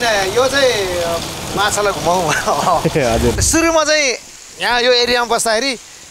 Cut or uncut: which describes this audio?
cut